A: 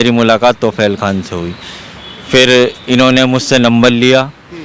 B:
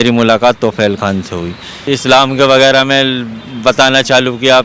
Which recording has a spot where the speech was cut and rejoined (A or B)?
B